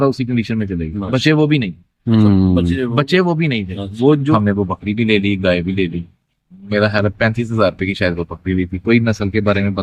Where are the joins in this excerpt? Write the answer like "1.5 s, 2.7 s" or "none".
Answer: 4.3 s